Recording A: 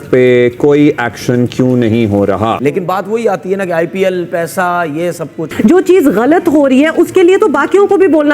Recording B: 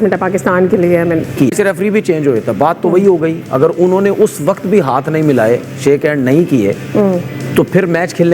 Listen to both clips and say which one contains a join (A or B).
A